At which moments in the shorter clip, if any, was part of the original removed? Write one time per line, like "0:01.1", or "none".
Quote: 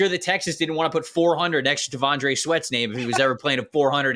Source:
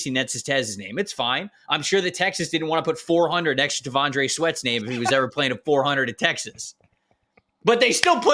none